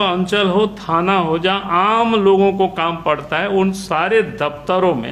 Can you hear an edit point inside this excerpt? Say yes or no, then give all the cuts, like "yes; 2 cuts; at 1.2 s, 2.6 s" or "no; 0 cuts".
no; 0 cuts